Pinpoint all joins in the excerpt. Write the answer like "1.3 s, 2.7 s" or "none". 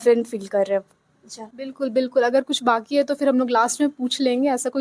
1.4 s